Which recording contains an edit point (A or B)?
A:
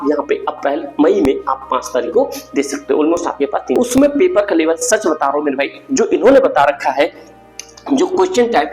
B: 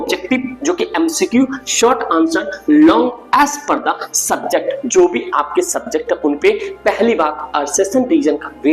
A